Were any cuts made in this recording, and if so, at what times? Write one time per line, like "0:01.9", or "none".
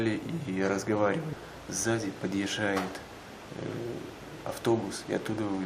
0:02.9